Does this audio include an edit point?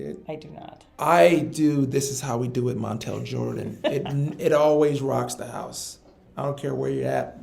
yes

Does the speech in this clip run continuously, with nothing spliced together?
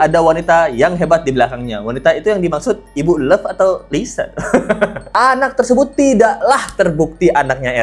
no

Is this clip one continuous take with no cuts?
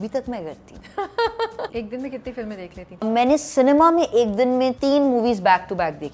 no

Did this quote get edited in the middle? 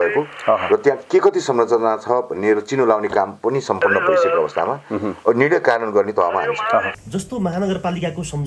yes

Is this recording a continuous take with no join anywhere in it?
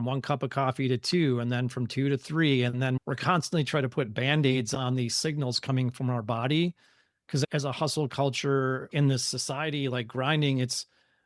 yes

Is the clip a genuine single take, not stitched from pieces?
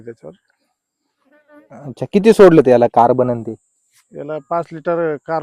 yes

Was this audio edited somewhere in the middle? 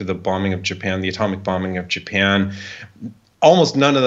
no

